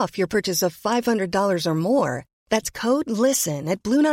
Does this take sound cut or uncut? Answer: uncut